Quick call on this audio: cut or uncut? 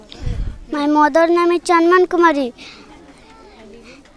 uncut